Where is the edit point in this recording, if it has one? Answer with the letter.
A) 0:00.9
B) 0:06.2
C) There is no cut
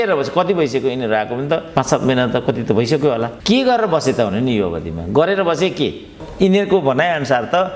B